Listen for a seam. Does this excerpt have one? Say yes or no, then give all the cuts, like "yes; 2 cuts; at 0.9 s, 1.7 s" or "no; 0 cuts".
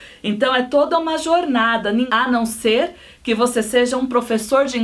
yes; 1 cut; at 2.1 s